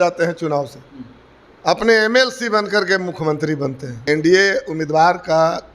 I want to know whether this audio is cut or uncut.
cut